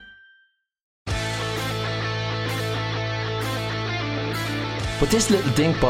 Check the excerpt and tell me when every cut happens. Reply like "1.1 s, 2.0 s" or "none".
0.9 s